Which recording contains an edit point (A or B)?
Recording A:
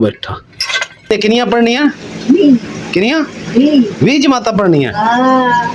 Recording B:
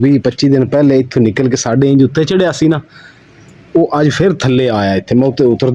A